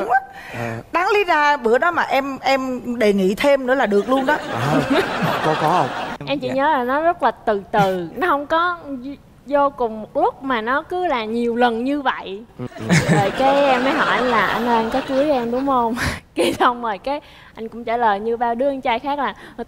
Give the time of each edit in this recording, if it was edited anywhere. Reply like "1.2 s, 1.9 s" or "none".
6.1 s, 12.7 s